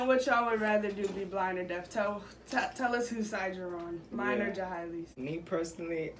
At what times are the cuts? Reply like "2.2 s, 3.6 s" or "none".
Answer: 5.1 s

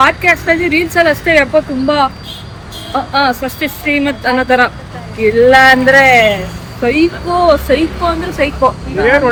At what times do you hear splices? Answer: none

